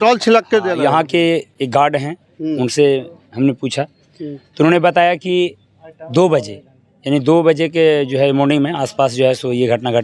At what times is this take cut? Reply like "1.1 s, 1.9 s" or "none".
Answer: none